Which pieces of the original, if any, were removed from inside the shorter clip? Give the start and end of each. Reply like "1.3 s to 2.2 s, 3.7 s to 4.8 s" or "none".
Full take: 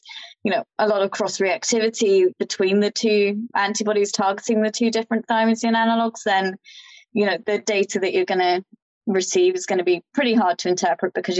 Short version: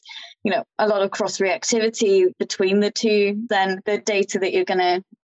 3.8 s to 7.4 s

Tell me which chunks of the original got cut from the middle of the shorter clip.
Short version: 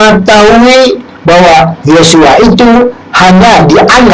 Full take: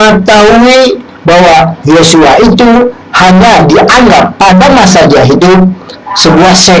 none

